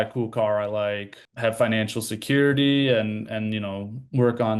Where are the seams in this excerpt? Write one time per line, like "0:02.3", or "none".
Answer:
none